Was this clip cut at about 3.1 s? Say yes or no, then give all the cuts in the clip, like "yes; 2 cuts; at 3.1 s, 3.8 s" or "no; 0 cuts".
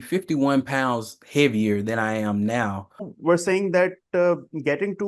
yes; 1 cut; at 3.1 s